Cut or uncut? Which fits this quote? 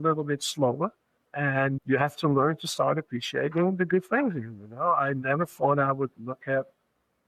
cut